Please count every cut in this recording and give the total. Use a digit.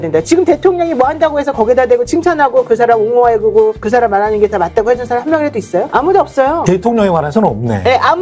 0